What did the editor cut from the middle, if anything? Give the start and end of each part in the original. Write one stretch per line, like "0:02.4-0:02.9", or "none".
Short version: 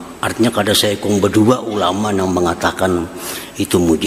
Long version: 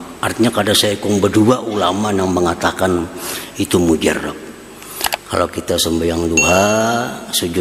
none